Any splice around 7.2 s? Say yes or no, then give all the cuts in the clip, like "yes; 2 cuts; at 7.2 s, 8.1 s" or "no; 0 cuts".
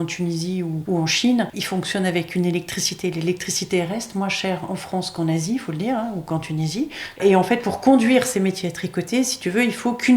yes; 3 cuts; at 0.8 s, 1.6 s, 7.2 s